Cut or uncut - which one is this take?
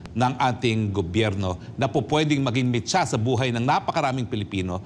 uncut